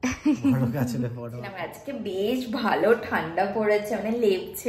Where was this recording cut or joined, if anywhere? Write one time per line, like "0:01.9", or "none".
0:01.8